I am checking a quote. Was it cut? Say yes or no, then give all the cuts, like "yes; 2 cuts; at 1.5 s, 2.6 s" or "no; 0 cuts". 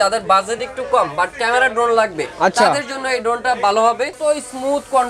yes; 1 cut; at 4.1 s